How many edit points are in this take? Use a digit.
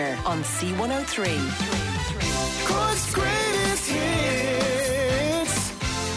0